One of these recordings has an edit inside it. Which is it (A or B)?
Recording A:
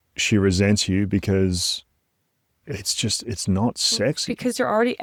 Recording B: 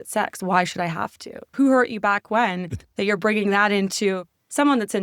B